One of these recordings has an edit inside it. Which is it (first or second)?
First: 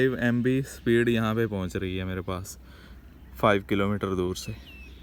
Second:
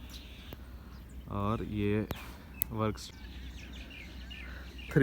second